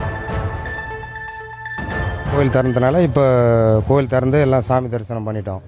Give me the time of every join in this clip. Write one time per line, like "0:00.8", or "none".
0:02.4